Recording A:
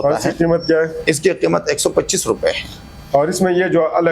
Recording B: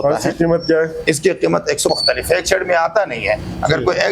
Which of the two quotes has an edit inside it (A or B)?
B